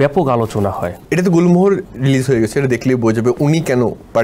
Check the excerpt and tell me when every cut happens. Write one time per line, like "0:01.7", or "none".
0:00.9
0:01.8